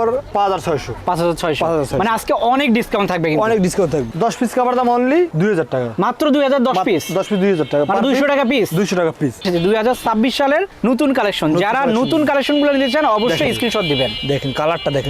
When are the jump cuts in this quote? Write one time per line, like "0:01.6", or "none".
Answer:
0:04.1
0:09.4